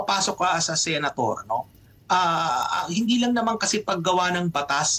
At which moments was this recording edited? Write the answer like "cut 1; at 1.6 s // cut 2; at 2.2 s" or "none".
none